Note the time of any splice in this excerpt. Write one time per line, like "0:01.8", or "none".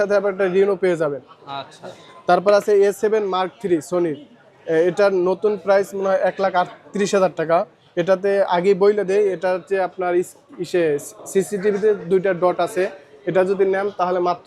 none